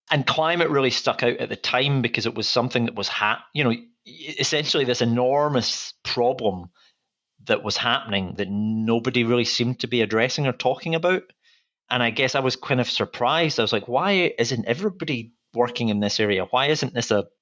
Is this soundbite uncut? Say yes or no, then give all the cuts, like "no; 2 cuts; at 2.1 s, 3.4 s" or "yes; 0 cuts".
yes; 0 cuts